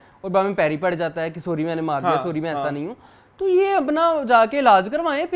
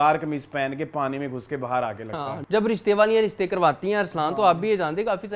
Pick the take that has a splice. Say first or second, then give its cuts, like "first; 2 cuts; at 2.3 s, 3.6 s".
second; 1 cut; at 2.4 s